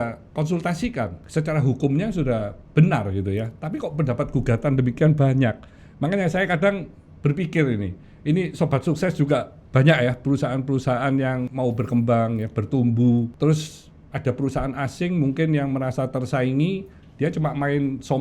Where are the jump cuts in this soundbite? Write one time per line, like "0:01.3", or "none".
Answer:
0:01.2
0:11.5
0:13.3